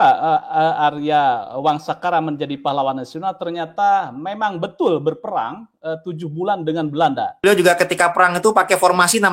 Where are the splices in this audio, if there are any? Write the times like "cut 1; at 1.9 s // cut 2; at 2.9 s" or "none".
cut 1; at 7.4 s